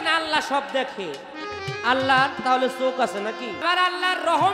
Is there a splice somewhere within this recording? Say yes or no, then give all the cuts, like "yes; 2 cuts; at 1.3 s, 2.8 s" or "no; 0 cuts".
yes; 1 cut; at 3.6 s